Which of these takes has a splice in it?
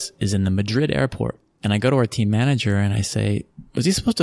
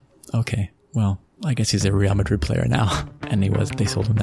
first; 1 cut; at 1.5 s

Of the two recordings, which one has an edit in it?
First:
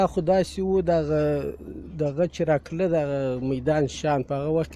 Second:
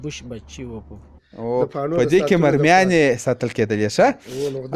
second; 1 cut; at 1.2 s

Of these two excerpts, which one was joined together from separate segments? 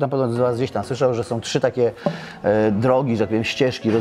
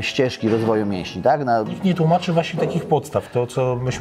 second; 1 cut; at 1.7 s

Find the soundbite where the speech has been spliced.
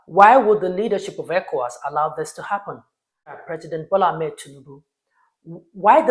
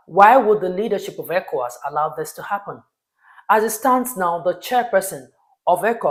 first; 1 cut; at 3.4 s

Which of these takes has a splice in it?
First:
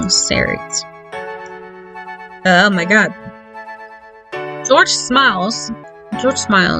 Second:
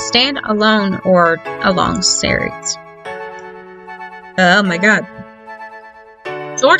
first; 1 cut; at 5.9 s

